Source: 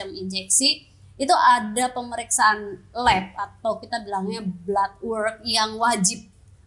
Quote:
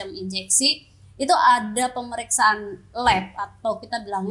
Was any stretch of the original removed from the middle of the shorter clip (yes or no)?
no